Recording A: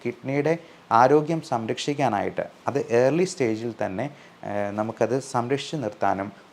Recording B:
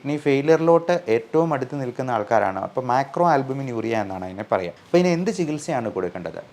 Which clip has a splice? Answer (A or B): B